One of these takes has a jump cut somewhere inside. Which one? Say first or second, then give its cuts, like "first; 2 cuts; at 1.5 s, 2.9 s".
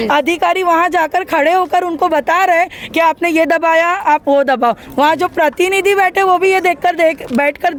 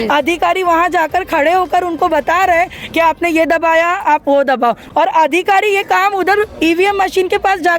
second; 1 cut; at 4.8 s